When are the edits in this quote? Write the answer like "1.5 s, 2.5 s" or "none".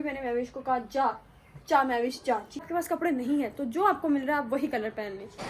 2.6 s